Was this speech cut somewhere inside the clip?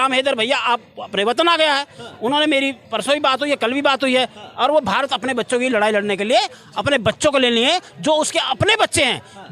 no; 0 cuts

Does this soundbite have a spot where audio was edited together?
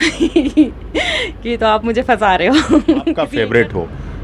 yes; 1 cut; at 3.2 s

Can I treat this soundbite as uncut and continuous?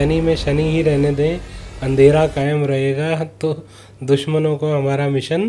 yes; 0 cuts

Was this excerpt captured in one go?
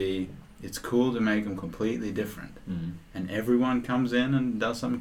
yes; 0 cuts

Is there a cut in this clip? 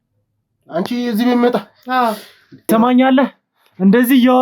yes; 1 cut; at 2.6 s

